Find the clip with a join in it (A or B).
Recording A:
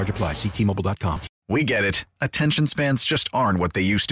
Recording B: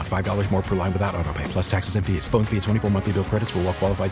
A